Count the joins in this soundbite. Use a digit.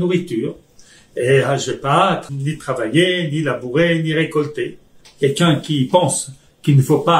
1